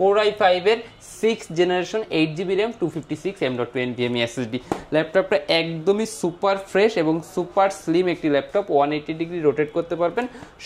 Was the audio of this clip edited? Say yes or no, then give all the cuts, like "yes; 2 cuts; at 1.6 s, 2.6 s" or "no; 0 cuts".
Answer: no; 0 cuts